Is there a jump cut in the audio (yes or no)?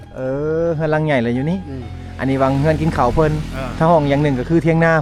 no